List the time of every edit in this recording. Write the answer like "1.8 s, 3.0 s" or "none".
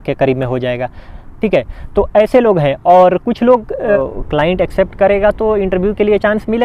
4.0 s

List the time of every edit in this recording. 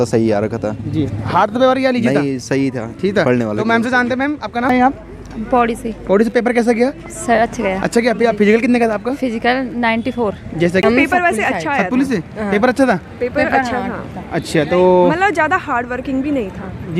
4.7 s, 10.8 s

